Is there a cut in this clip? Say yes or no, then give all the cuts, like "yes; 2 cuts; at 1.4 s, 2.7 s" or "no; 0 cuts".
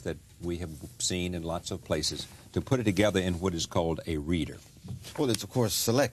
yes; 1 cut; at 3.4 s